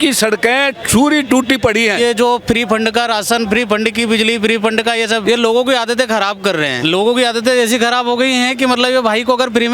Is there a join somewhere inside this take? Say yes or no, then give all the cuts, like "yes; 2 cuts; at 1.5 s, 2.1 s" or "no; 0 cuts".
yes; 3 cuts; at 2.0 s, 5.2 s, 6.8 s